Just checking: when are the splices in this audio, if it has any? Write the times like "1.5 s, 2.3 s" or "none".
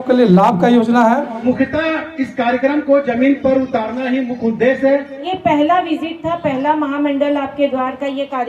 1.3 s, 5.2 s